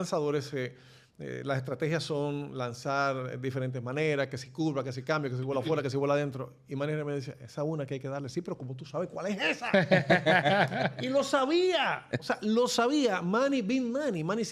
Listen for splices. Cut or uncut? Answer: uncut